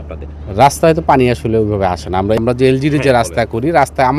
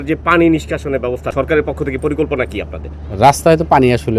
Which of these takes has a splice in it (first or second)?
second